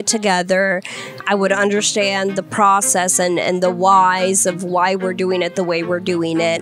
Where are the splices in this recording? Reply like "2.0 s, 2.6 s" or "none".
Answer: none

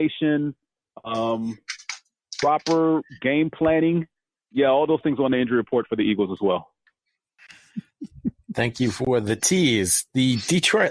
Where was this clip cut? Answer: none

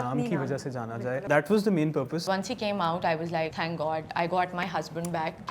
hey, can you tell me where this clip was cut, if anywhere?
1.2 s, 2.3 s, 3.6 s

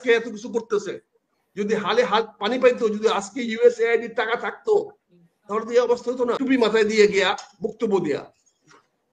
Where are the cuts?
6.4 s

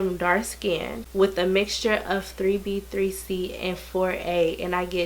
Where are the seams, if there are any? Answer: 1.0 s

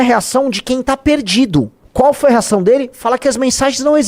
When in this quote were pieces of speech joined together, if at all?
1.8 s

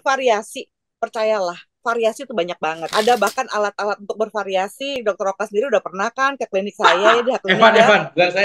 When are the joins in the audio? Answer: 2.9 s, 4.9 s

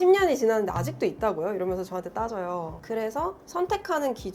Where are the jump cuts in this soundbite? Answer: 2.8 s

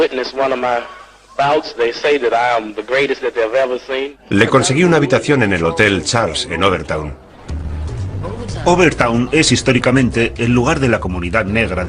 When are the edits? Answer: none

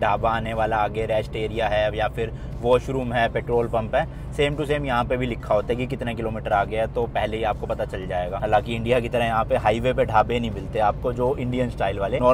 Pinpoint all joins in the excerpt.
none

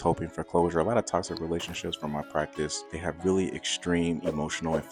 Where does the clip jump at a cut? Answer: 2.9 s

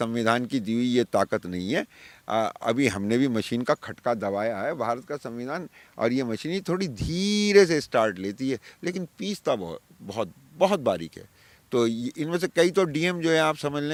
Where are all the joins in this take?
none

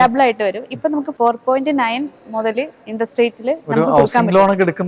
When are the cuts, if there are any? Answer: 1.1 s

